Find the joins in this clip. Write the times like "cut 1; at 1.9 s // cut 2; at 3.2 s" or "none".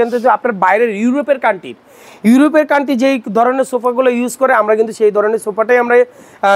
none